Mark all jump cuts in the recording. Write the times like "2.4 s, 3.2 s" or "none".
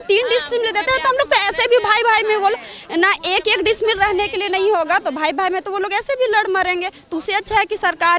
none